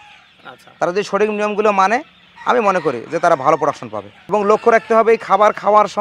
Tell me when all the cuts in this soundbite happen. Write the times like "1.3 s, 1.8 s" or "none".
4.3 s